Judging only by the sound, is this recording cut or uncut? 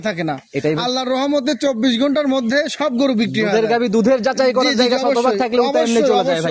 uncut